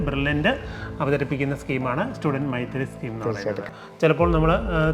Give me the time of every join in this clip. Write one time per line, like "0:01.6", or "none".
0:03.7